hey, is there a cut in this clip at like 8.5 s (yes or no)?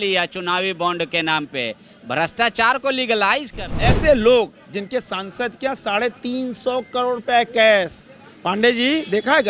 no